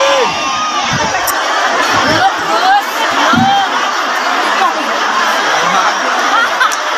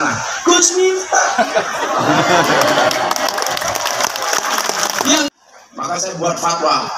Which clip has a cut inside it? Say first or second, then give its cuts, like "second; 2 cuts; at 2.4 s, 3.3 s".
second; 1 cut; at 5.3 s